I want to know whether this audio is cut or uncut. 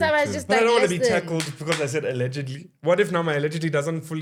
uncut